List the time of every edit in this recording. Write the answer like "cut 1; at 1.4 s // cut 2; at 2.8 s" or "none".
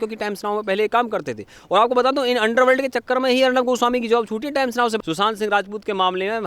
cut 1; at 5.0 s